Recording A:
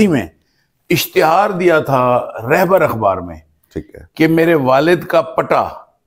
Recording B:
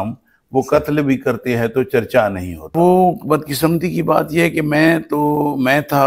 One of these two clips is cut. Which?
B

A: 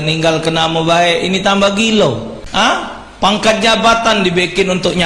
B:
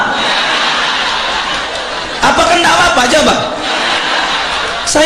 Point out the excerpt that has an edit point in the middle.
A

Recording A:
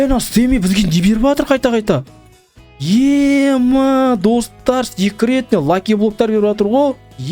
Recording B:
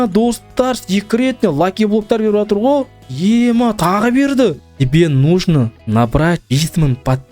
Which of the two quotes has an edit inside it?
B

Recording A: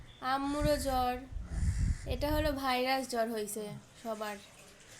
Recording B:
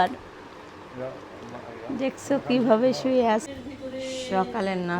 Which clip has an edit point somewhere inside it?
B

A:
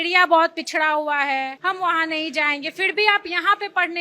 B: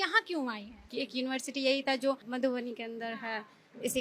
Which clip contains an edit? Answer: A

